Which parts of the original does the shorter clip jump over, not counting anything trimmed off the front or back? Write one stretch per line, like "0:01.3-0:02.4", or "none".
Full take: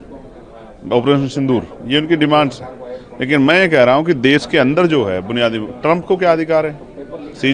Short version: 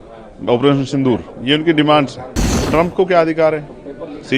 0:03.0-0:05.7